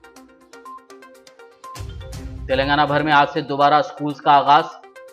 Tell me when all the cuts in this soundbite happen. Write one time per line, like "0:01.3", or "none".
none